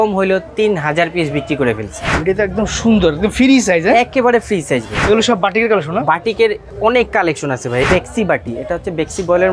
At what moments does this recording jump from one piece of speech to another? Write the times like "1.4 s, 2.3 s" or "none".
2.1 s, 4.9 s, 6.7 s, 7.9 s